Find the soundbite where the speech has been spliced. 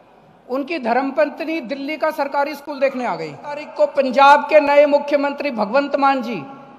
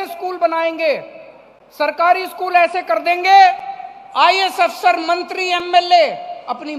first; 1 cut; at 3.7 s

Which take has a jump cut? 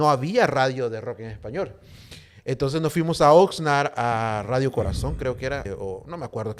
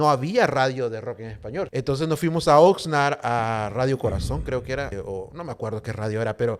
second; 1 cut; at 1.7 s

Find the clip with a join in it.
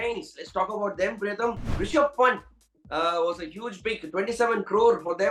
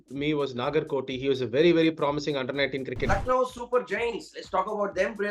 second; 1 cut; at 3.0 s

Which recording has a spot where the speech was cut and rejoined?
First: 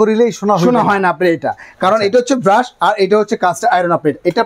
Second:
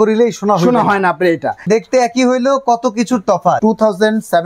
second; 2 cuts; at 1.7 s, 3.6 s

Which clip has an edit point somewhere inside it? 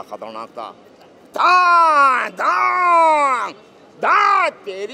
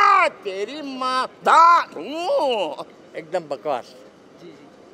second; 1 cut; at 2.9 s

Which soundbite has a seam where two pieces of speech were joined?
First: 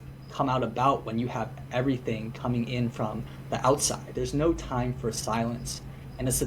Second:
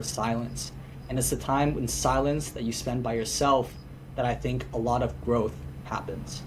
first; 1 cut; at 4.1 s

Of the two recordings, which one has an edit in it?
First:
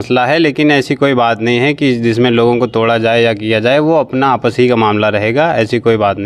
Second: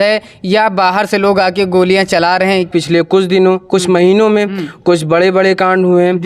second; 1 cut; at 2.7 s

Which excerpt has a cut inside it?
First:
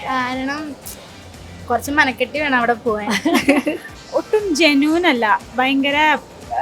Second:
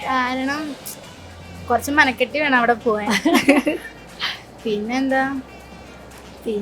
first; 1 cut; at 3.9 s

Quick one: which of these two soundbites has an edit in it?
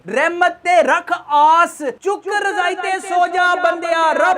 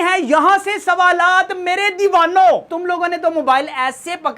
second; 1 cut; at 2.7 s

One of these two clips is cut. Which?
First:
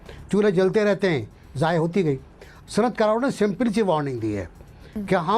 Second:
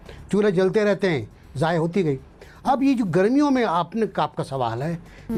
first; 1 cut; at 2.5 s

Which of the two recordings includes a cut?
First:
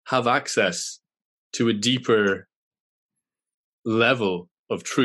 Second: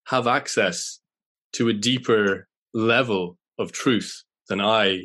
second; 1 cut; at 2.5 s

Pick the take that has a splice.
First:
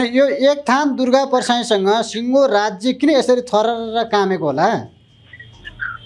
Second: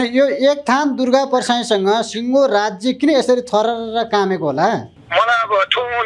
second; 1 cut; at 5.0 s

